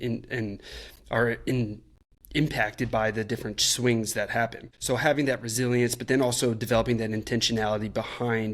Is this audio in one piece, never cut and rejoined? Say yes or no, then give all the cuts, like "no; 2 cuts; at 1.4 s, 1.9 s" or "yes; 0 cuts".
no; 1 cut; at 4.7 s